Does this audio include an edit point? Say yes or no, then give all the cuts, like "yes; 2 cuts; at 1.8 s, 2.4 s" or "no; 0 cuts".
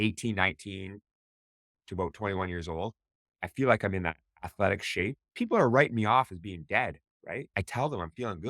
yes; 2 cuts; at 5.2 s, 7.5 s